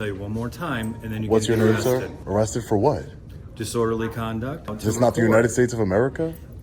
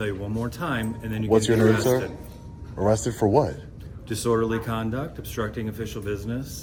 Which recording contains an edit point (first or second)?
first